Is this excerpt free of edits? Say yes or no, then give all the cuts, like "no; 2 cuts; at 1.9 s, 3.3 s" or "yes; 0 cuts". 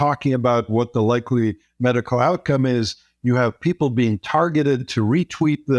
yes; 0 cuts